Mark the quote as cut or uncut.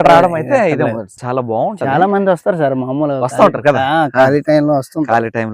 cut